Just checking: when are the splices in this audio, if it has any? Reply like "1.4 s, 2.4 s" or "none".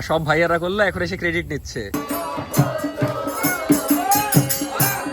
1.9 s